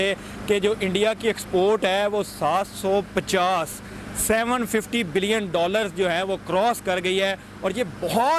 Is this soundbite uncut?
yes; 0 cuts

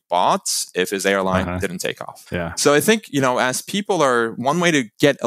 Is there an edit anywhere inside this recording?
yes; 1 cut; at 2.1 s

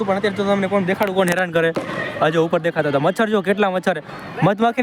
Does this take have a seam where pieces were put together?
no; 0 cuts

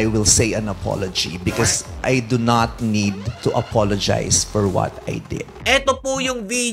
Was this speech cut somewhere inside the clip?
yes; 3 cuts; at 1.9 s, 3.3 s, 5.5 s

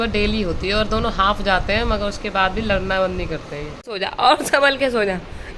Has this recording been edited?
yes; 1 cut; at 3.9 s

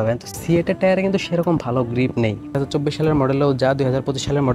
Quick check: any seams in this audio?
yes; 1 cut; at 2.6 s

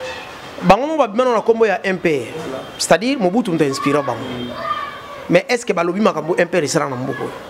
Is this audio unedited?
yes; 0 cuts

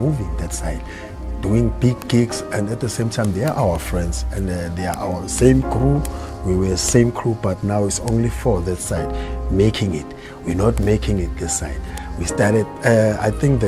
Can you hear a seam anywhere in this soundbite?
no; 0 cuts

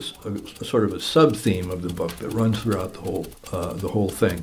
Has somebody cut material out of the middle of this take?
yes; 1 cut; at 3.4 s

